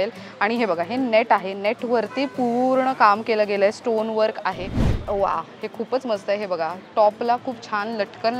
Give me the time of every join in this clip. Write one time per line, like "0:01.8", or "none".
0:04.9